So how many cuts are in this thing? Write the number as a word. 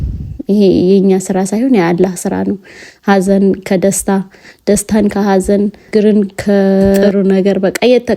two